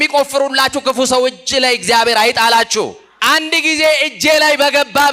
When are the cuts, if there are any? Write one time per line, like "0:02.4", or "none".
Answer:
0:03.0

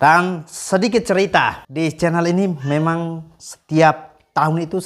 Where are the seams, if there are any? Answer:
0:01.6

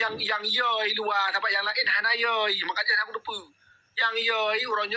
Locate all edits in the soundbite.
none

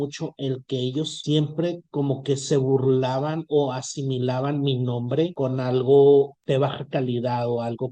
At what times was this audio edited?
0:01.2
0:05.3
0:06.4

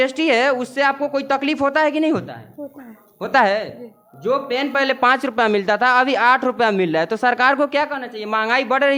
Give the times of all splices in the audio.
none

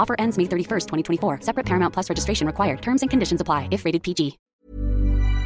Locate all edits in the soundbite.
0:04.4

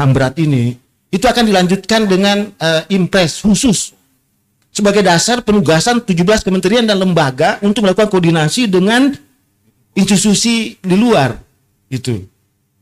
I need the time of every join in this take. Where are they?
none

